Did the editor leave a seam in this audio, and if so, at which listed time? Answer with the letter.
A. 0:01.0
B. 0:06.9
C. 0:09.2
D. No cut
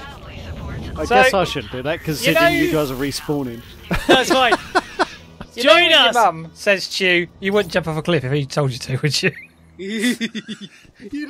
A